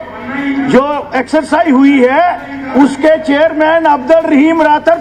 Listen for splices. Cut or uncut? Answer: uncut